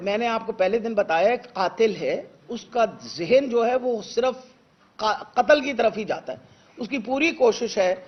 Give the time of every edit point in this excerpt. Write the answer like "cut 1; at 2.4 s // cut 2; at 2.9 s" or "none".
none